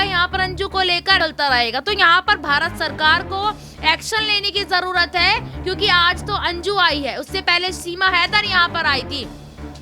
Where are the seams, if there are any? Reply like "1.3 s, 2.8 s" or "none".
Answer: 1.2 s